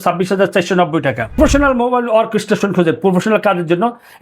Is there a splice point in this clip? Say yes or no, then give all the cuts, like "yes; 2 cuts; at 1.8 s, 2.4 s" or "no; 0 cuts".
yes; 1 cut; at 1.4 s